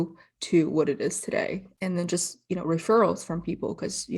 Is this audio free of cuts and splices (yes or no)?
no